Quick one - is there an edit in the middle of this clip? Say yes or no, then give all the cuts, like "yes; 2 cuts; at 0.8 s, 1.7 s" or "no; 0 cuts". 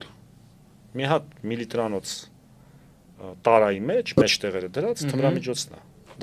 no; 0 cuts